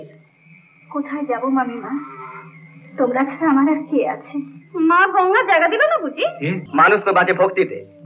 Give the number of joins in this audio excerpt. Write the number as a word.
one